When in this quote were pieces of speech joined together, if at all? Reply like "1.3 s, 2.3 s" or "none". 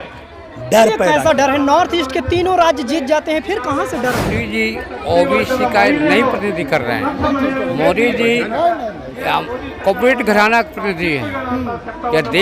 4.4 s